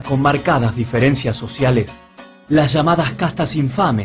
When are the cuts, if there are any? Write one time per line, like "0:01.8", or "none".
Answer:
none